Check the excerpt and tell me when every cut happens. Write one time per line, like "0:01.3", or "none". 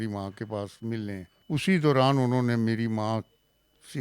0:01.3

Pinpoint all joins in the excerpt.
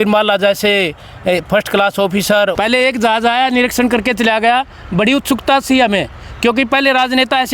0:02.5

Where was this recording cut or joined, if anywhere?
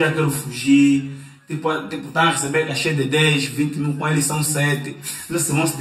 none

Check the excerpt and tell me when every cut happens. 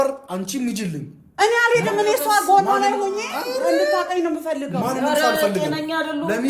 none

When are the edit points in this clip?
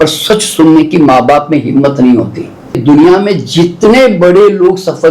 0:02.8

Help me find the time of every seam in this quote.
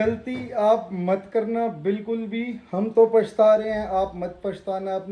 none

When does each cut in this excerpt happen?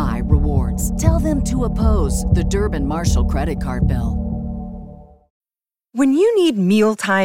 0:05.5

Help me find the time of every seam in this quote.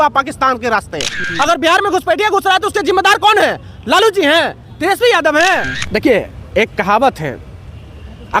0:01.2
0:05.8

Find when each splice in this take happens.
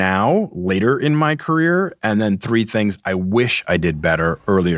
none

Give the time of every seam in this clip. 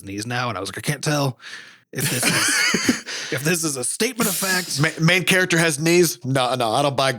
0:06.2

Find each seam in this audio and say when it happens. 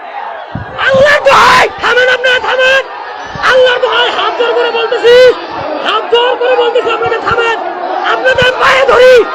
none

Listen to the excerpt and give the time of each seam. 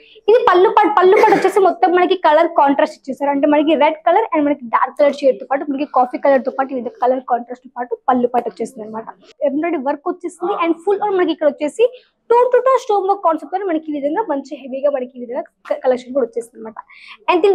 0:09.3

